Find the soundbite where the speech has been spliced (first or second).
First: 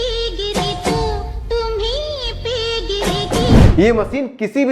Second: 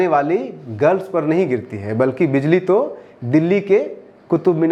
first